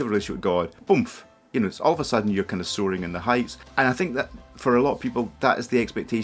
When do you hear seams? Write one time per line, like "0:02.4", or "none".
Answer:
0:03.6
0:05.3